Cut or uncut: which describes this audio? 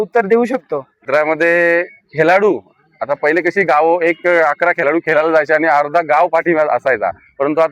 cut